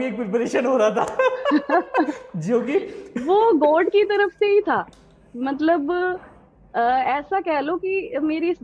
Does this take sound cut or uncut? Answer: uncut